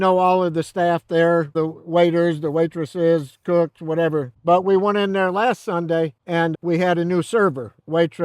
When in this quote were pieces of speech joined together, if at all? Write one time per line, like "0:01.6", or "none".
0:04.3